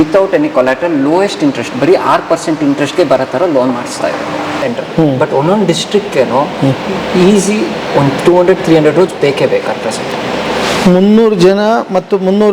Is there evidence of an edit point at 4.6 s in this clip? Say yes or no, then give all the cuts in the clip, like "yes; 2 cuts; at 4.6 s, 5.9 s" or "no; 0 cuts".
yes; 1 cut; at 4.6 s